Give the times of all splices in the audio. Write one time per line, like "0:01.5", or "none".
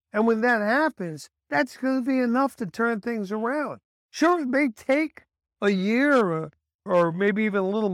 none